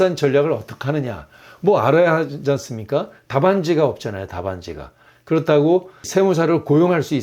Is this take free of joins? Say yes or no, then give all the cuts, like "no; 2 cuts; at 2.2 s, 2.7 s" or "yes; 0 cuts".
no; 1 cut; at 6.1 s